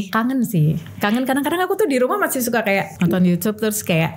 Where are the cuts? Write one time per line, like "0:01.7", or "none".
0:02.9